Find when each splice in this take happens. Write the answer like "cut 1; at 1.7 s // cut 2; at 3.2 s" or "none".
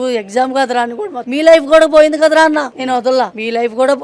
cut 1; at 1.2 s // cut 2; at 3.1 s